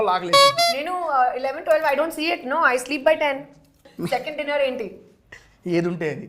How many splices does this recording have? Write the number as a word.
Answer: one